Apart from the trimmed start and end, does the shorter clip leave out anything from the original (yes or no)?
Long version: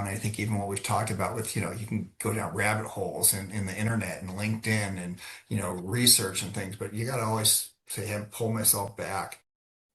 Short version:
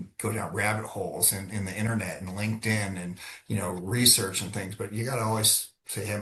no